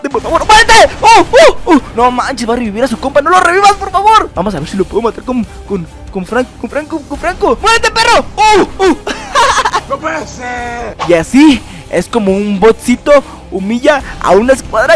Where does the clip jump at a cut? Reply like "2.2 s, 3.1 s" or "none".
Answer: 1.9 s, 4.3 s, 7.6 s, 10.9 s